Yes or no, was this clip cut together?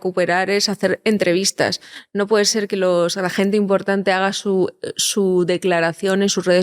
no